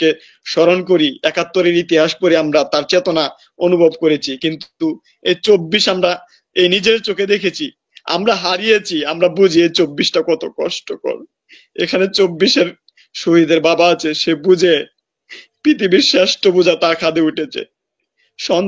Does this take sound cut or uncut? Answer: uncut